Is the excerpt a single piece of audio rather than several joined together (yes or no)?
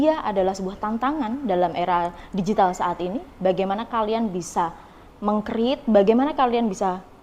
yes